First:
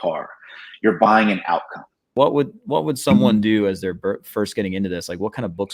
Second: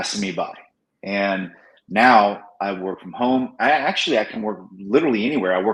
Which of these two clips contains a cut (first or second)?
first